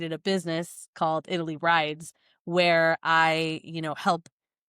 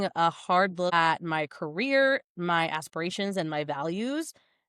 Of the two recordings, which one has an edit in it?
second; 1 cut; at 0.9 s

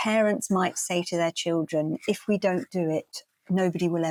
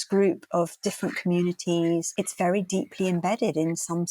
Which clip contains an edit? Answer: second; 1 cut; at 2.1 s

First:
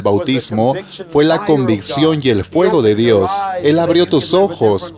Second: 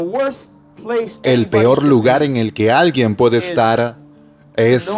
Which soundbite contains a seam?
second; 1 cut; at 1.2 s

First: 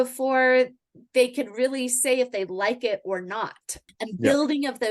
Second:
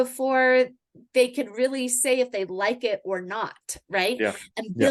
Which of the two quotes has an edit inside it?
first; 1 cut; at 3.8 s

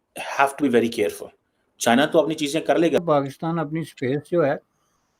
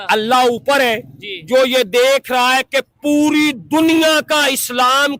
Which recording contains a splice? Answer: first; 1 cut; at 3.0 s

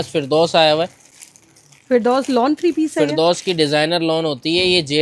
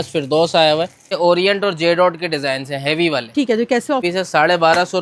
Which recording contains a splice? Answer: second; 2 cuts; at 1.2 s, 4.0 s

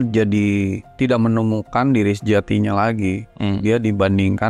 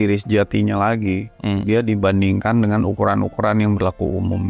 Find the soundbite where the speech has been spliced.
first; 1 cut; at 1.0 s

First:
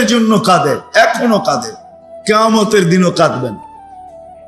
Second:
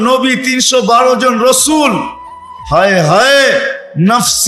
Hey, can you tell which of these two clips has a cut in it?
first; 1 cut; at 3.6 s

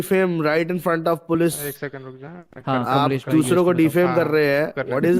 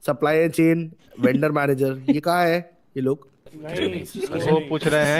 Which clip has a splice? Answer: second; 1 cut; at 3.6 s

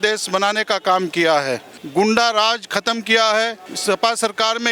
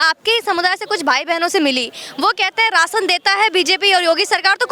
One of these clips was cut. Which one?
first; 2 cuts; at 1.7 s, 3.7 s

